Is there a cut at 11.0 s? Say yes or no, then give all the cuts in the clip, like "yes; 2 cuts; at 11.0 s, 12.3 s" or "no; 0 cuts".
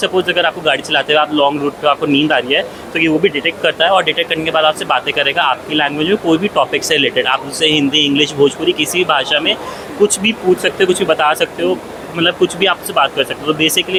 no; 0 cuts